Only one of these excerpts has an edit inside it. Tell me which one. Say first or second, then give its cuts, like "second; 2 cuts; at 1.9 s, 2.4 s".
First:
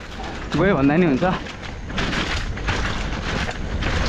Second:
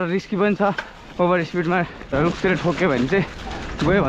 second; 1 cut; at 2.1 s